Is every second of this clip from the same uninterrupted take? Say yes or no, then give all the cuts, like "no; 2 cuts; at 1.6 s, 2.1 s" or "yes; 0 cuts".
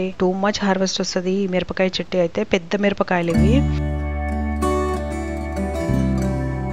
yes; 0 cuts